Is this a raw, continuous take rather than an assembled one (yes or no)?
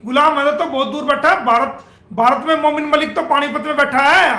yes